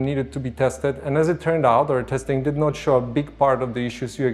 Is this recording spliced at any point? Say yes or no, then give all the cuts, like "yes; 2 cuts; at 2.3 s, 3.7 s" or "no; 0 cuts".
no; 0 cuts